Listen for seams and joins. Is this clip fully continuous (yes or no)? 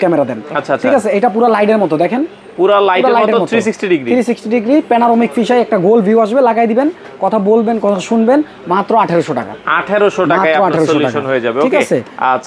yes